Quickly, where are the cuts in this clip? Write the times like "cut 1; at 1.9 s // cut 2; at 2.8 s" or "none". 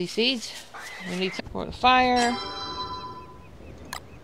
none